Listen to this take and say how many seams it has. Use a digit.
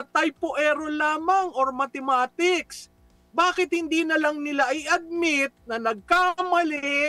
0